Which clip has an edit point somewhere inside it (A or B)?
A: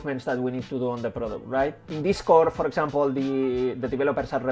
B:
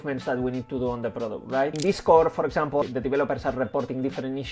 B